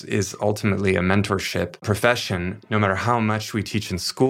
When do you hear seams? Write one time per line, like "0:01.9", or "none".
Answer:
0:01.8